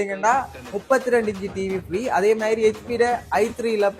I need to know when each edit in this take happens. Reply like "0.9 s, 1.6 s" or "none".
none